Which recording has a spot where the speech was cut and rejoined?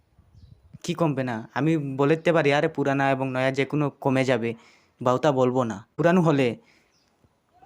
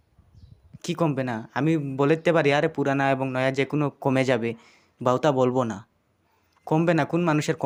first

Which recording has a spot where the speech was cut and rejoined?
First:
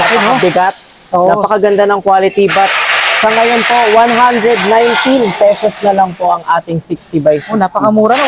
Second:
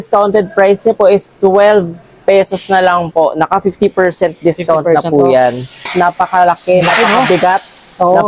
second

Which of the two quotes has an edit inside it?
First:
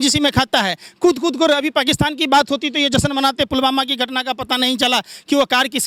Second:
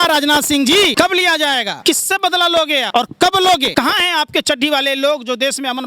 second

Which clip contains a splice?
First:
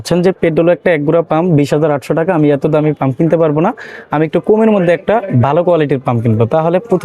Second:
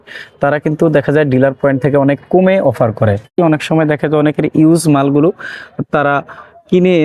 second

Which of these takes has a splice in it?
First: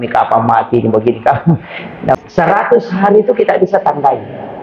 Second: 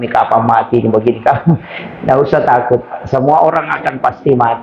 first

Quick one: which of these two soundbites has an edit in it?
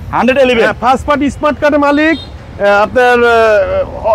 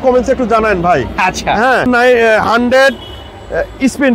second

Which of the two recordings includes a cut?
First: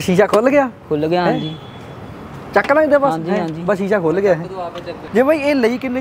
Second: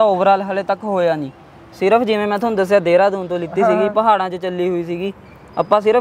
first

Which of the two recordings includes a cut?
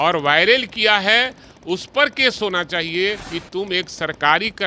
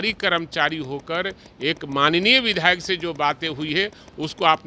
first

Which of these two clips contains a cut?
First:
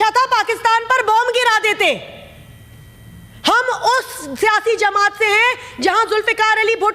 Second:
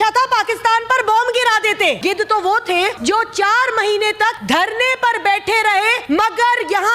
second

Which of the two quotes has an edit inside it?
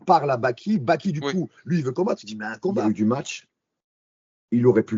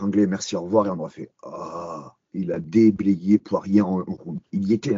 first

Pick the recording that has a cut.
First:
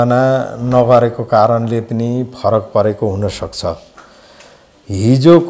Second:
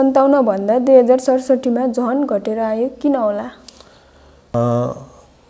second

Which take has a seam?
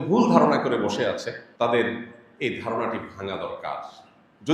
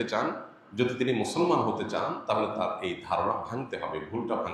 first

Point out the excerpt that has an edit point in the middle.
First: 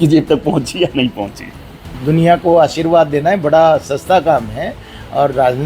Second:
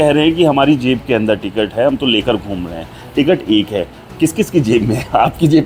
first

